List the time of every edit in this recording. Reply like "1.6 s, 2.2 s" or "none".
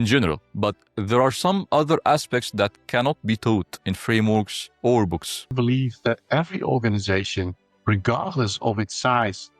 5.5 s